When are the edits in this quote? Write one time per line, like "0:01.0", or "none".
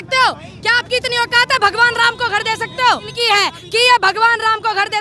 0:03.1